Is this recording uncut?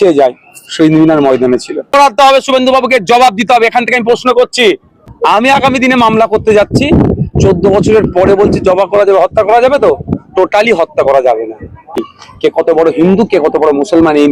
no; 3 cuts; at 1.9 s, 5.1 s, 12.0 s

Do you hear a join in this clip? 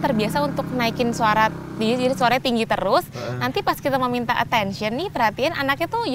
no; 0 cuts

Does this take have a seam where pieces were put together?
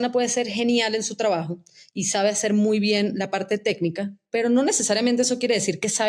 no; 0 cuts

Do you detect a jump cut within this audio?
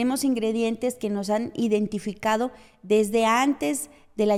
no; 0 cuts

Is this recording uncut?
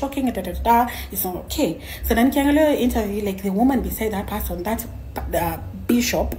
yes; 0 cuts

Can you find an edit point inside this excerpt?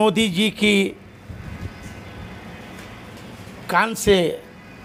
no; 0 cuts

